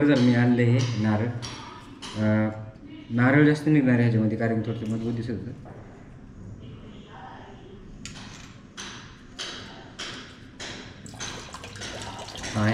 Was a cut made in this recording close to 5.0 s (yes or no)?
no